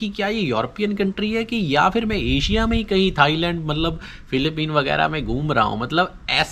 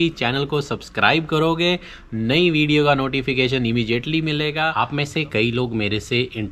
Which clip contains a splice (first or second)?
second